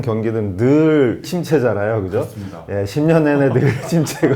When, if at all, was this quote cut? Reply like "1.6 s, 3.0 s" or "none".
1.2 s, 2.6 s